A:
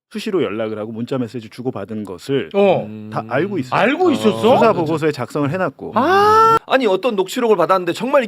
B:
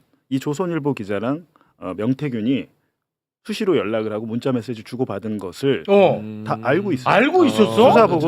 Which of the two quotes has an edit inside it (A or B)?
A